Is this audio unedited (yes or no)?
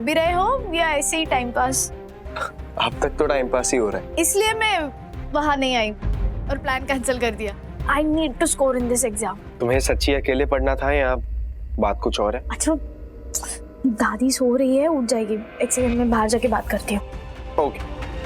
no